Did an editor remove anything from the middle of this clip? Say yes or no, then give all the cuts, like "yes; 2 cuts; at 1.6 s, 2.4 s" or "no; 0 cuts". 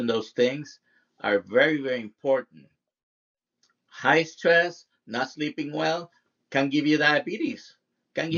no; 0 cuts